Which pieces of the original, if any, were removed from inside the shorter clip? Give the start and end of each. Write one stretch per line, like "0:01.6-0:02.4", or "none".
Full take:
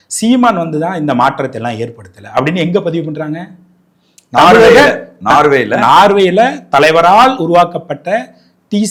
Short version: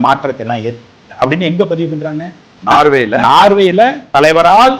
0:03.7-0:05.1